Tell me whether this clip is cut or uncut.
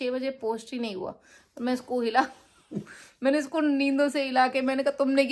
uncut